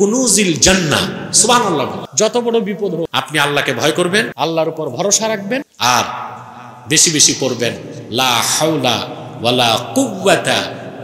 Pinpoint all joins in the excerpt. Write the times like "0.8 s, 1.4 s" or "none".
2.0 s, 3.1 s, 4.3 s, 5.7 s